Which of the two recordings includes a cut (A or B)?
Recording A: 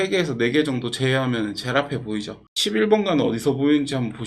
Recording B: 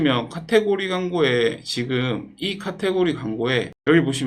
A